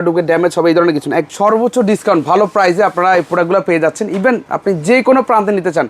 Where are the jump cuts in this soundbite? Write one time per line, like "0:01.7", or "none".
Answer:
0:01.3